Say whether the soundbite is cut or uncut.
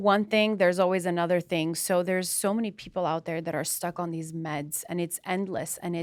uncut